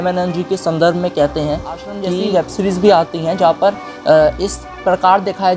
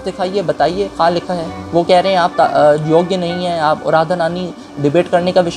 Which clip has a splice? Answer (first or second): first